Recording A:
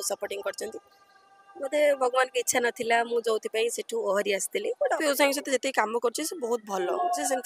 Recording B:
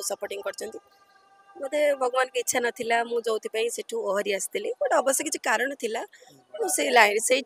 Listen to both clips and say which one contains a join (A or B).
A